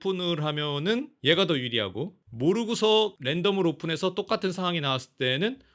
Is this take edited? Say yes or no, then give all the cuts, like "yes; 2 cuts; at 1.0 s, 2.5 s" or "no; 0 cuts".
no; 0 cuts